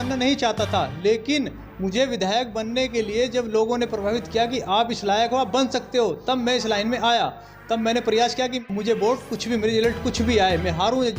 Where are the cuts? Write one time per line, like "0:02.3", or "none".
0:08.6